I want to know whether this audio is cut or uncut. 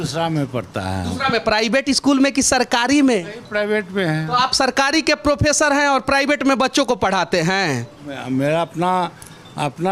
uncut